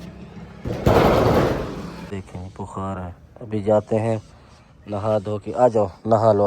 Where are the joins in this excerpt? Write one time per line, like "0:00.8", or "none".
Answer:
0:02.1